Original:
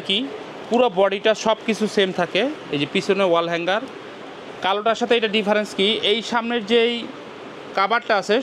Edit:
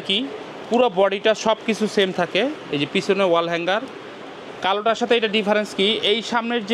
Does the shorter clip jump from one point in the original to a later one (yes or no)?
no